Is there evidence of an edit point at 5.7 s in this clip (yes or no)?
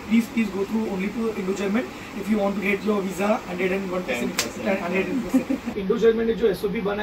yes